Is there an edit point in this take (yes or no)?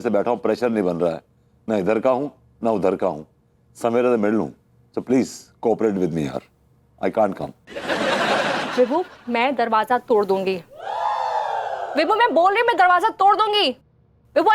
no